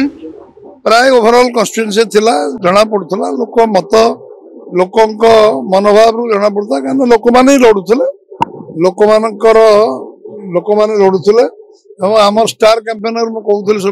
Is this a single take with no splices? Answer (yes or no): yes